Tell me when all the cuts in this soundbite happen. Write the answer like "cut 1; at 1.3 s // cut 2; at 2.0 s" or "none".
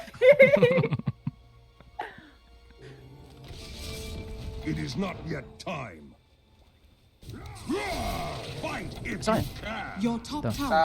cut 1; at 3.3 s